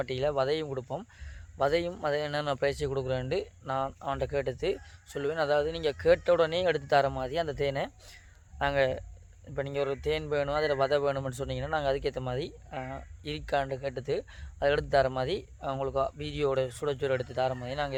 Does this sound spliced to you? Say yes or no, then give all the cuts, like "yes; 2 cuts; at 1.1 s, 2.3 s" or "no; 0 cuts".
no; 0 cuts